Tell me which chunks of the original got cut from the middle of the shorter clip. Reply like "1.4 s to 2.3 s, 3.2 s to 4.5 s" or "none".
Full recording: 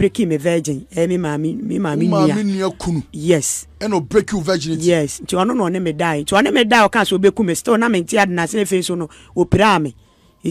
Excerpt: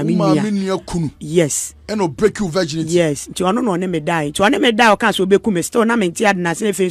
none